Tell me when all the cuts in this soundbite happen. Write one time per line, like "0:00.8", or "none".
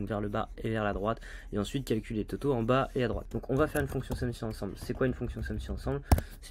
0:03.3